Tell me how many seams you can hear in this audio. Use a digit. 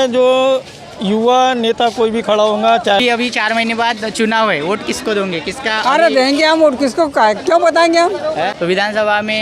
2